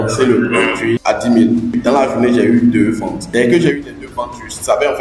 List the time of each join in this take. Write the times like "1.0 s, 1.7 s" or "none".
1.0 s, 1.8 s, 3.2 s